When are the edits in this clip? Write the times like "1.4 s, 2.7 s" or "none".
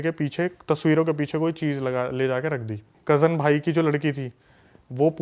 2.9 s